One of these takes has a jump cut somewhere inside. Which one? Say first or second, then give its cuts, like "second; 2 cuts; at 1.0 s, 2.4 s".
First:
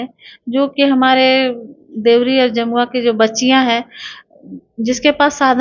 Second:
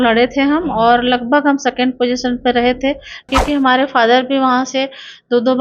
second; 1 cut; at 3.3 s